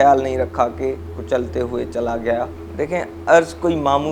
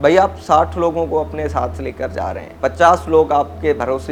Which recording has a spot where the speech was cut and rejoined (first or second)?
first